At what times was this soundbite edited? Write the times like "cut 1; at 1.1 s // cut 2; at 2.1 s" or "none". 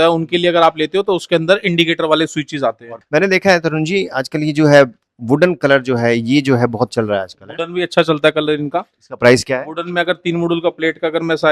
cut 1; at 3.0 s